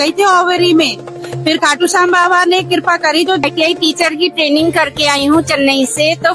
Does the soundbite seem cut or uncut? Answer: cut